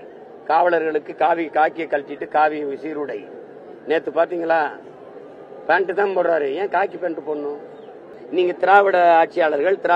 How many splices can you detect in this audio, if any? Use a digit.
1